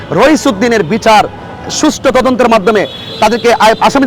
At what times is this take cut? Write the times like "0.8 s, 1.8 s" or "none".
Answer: none